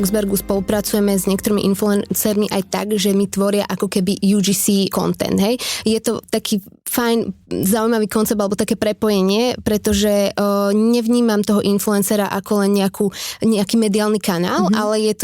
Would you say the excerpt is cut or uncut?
cut